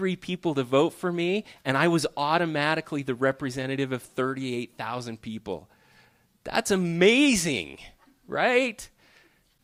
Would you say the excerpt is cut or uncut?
uncut